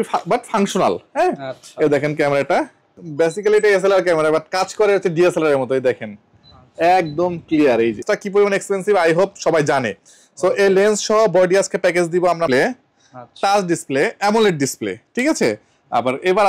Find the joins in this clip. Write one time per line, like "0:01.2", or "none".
0:03.0
0:08.0
0:12.5